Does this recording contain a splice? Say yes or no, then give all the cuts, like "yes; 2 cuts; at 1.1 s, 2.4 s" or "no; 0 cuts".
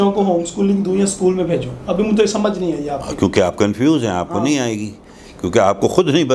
no; 0 cuts